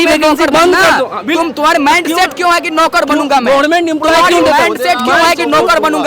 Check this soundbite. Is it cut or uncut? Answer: uncut